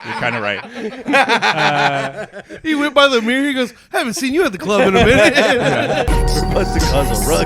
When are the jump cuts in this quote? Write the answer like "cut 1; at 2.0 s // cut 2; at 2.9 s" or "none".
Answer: cut 1; at 6.1 s